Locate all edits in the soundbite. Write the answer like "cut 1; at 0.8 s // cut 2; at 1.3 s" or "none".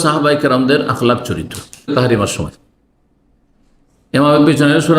cut 1; at 1.9 s